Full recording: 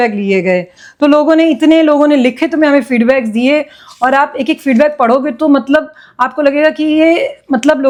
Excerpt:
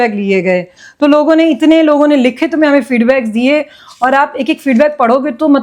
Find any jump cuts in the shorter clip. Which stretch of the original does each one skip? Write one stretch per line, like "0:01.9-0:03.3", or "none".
none